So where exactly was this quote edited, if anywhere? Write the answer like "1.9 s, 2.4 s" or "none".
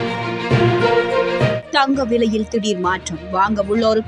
1.6 s